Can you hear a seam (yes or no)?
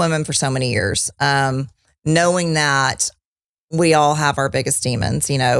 no